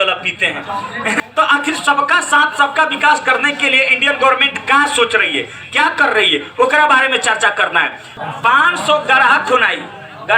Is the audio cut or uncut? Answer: cut